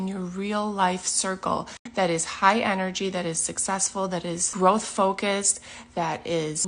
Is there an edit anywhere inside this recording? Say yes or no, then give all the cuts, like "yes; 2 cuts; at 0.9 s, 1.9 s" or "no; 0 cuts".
yes; 1 cut; at 4.5 s